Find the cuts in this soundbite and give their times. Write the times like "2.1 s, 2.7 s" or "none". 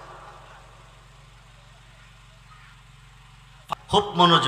3.5 s